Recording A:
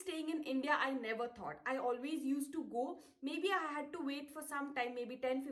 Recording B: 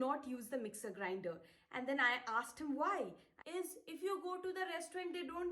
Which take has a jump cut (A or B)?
B